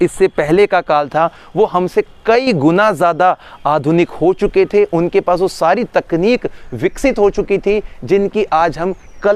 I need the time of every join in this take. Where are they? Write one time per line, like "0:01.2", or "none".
none